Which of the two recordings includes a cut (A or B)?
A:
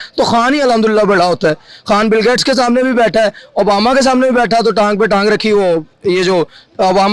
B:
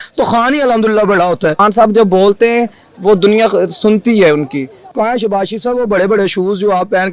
B